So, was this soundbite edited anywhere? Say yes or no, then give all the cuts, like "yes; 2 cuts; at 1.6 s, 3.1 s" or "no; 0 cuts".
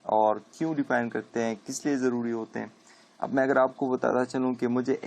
yes; 1 cut; at 1.2 s